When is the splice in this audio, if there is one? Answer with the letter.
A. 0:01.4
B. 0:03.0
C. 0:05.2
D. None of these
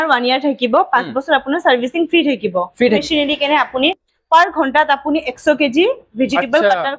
B